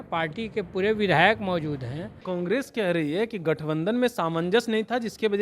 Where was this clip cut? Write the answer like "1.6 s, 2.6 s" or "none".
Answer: 2.2 s